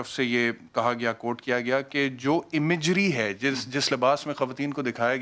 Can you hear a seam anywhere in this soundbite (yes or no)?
no